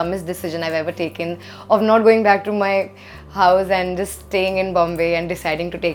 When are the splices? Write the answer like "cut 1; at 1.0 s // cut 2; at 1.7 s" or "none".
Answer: none